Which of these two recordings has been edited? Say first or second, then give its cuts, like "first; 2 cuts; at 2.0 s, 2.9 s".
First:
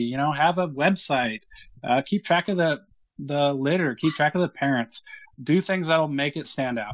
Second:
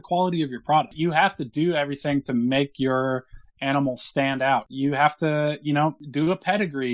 second; 3 cuts; at 0.9 s, 4.7 s, 6.0 s